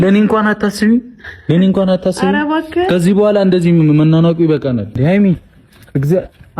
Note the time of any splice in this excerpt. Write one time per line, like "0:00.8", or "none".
0:05.0